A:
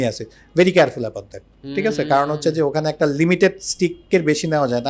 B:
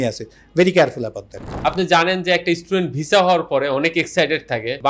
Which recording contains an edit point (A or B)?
B